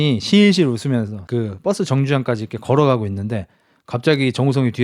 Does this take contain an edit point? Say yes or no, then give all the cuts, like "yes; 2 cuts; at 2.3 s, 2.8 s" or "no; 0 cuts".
yes; 1 cut; at 1.2 s